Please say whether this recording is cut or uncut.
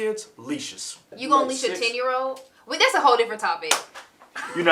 cut